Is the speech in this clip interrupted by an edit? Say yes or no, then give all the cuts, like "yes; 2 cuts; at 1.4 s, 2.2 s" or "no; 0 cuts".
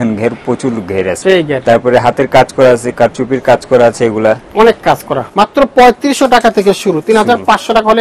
yes; 2 cuts; at 1.1 s, 5.2 s